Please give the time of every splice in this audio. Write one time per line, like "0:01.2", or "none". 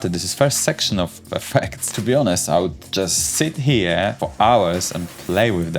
0:01.9
0:04.2